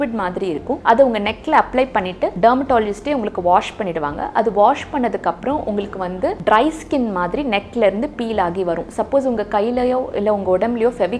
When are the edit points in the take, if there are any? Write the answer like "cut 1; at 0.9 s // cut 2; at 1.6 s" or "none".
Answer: cut 1; at 0.8 s // cut 2; at 2.3 s // cut 3; at 6.4 s